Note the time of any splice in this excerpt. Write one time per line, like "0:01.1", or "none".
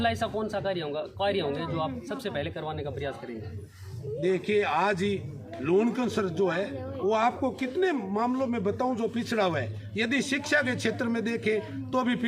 none